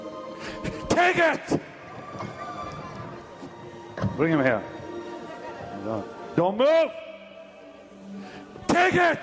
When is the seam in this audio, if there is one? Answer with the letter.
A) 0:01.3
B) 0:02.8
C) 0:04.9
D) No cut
D